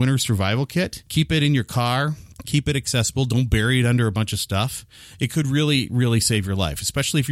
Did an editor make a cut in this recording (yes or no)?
yes